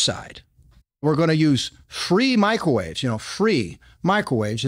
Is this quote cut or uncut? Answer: cut